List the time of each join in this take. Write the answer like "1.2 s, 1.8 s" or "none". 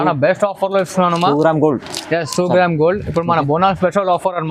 none

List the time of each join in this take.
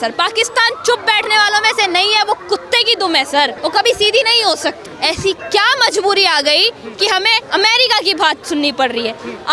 3.6 s, 4.9 s, 7.4 s

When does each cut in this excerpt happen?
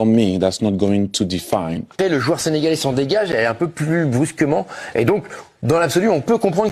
1.9 s

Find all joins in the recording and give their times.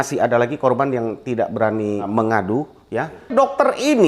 2.1 s, 3.3 s

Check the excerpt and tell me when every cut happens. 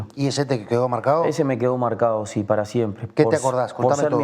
none

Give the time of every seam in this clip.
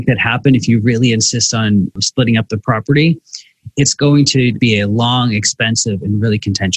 2.0 s, 4.6 s

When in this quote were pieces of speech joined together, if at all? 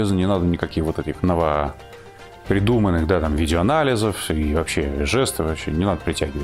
1.1 s

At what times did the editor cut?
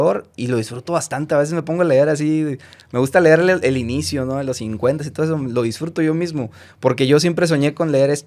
none

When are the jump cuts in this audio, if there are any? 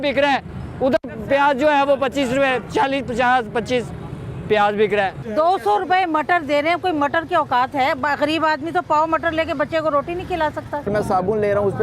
5.2 s, 10.9 s

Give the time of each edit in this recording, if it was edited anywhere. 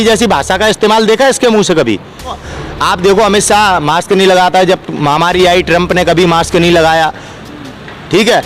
2.5 s

